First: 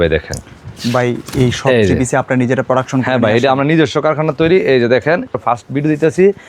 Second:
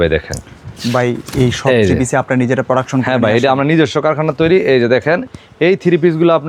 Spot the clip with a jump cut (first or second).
first